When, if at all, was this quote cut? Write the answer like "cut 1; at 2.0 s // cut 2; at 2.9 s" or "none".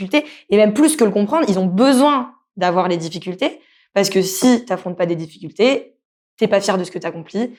none